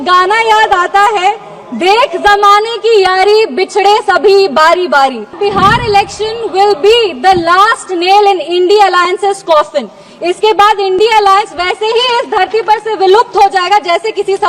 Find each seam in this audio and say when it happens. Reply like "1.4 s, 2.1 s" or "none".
5.3 s